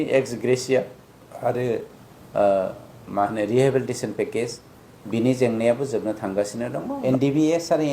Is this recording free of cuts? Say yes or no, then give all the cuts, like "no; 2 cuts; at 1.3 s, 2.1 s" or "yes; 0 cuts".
no; 1 cut; at 7.0 s